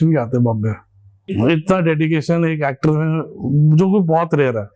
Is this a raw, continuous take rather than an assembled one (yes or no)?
no